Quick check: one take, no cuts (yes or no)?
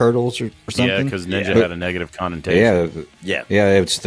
yes